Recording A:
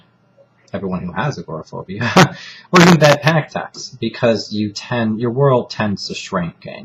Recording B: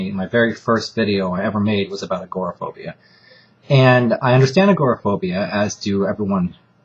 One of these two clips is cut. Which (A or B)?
B